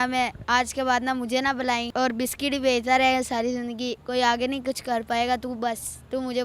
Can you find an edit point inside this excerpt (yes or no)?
yes